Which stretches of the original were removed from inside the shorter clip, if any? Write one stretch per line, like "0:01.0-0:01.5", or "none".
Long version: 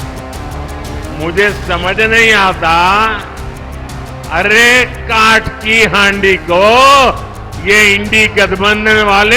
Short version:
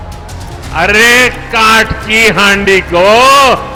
none